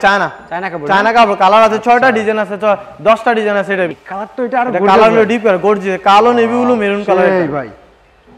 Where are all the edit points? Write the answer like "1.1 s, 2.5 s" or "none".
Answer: 3.9 s